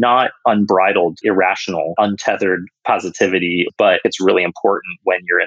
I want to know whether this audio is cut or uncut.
cut